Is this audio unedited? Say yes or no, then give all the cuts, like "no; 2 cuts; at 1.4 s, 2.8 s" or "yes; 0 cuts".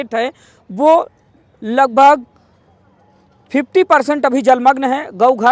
yes; 0 cuts